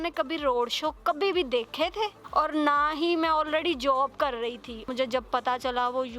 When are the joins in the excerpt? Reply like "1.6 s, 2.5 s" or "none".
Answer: 2.2 s, 4.9 s